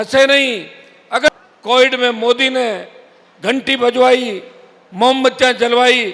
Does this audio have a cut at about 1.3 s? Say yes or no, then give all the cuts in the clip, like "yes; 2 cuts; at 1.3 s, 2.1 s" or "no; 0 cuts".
yes; 1 cut; at 1.3 s